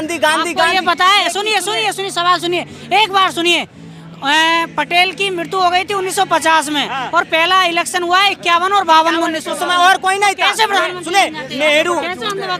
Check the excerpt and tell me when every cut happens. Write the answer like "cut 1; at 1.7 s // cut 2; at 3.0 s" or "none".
none